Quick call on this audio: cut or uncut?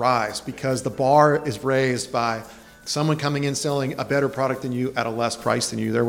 uncut